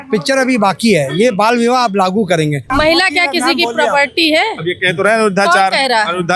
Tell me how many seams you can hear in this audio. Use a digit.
1